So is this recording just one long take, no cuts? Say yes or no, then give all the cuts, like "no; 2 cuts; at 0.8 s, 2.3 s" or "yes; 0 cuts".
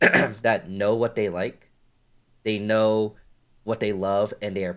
yes; 0 cuts